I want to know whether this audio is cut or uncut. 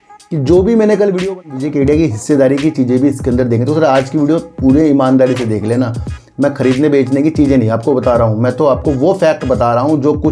cut